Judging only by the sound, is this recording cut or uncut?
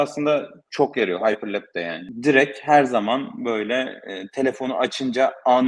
uncut